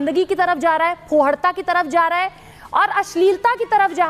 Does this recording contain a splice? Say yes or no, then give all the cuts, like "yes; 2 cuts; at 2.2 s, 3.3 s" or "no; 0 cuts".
no; 0 cuts